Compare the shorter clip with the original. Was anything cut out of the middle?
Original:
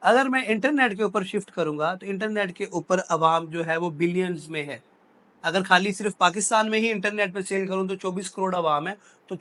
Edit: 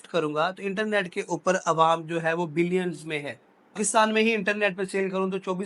yes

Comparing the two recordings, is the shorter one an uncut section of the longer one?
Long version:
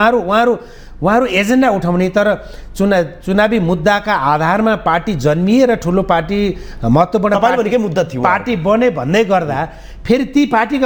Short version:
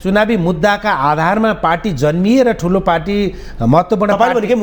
yes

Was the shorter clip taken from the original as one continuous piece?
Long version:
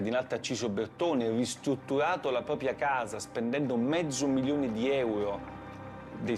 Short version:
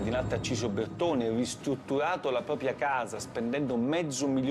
yes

